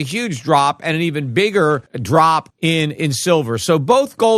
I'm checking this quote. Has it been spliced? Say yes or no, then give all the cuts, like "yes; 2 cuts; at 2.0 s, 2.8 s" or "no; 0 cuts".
no; 0 cuts